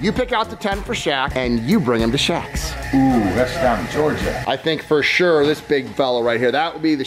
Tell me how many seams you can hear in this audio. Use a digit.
2